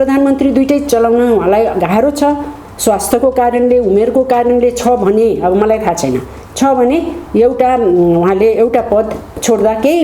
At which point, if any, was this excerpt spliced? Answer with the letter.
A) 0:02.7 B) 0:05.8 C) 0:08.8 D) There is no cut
D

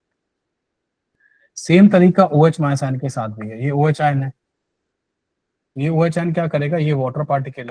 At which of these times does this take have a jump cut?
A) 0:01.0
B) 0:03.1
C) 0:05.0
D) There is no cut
A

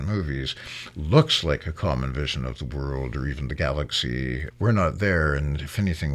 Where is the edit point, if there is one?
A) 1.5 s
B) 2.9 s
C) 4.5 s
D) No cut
C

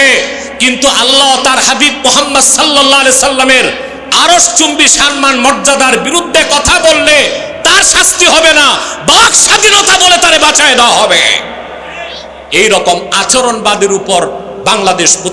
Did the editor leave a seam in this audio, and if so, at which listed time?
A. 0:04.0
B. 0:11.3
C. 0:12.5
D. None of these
D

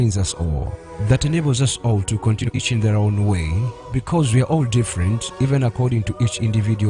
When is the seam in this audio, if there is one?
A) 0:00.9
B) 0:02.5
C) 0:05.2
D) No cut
B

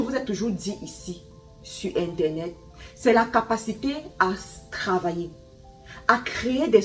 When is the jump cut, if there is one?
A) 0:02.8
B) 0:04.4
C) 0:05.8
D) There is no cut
D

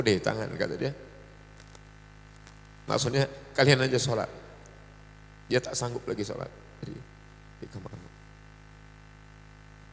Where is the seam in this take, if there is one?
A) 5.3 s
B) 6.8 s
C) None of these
C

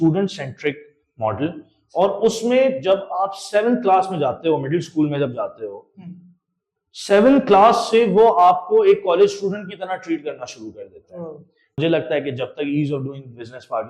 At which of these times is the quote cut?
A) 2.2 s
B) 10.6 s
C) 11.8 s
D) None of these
C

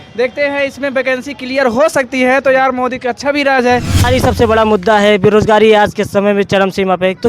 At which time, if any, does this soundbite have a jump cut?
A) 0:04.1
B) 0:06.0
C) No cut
A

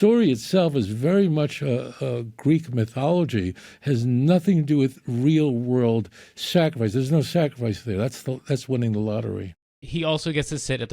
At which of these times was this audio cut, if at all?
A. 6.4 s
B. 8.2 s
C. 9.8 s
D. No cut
C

